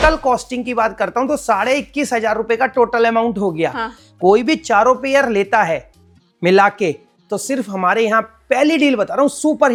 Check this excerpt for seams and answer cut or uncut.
uncut